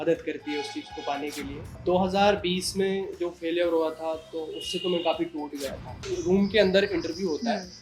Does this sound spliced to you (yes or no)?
yes